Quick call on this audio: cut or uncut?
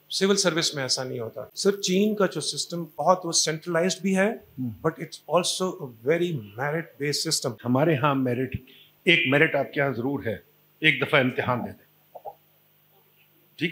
cut